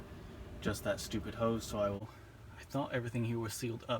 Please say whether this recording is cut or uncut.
cut